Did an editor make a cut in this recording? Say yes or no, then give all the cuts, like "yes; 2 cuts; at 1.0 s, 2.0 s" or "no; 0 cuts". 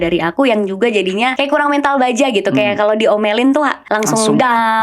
yes; 2 cuts; at 1.3 s, 3.8 s